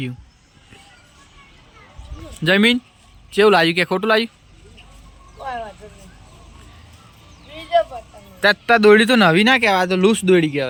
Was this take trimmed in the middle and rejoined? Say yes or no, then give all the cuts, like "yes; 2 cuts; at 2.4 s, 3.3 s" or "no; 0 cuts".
no; 0 cuts